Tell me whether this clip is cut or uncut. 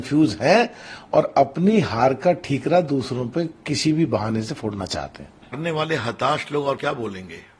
cut